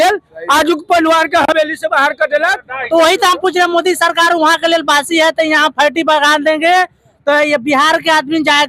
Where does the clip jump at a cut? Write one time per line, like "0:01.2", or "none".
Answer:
0:02.7